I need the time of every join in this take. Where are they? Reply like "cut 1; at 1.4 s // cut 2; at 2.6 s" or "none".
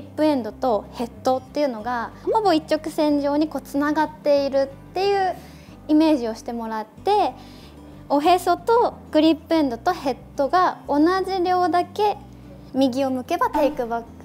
cut 1; at 2.2 s